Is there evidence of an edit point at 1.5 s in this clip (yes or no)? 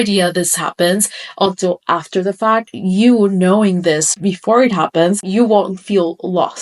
no